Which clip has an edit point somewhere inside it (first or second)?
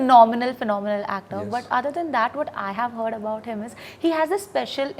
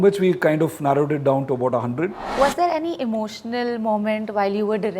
second